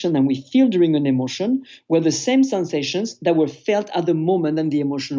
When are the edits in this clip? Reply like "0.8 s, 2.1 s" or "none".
none